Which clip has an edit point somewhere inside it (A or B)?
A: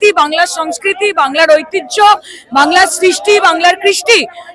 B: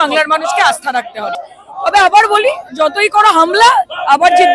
B